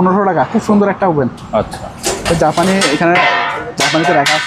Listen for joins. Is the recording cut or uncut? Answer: uncut